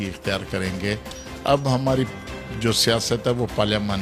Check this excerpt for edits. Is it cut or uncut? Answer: uncut